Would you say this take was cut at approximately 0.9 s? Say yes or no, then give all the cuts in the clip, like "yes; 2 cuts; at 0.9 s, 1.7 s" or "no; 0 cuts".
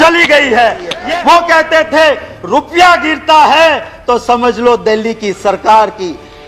yes; 1 cut; at 0.9 s